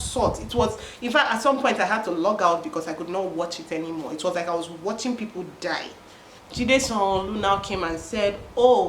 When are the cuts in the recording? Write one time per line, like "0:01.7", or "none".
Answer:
0:06.4